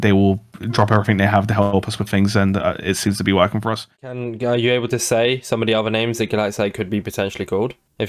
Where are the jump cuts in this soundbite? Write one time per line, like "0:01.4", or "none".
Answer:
0:04.0